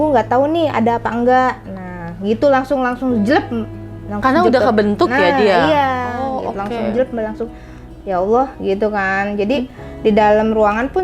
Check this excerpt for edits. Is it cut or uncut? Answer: uncut